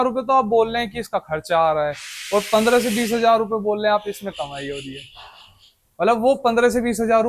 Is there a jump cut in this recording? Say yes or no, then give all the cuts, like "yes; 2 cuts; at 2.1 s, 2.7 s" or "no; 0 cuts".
no; 0 cuts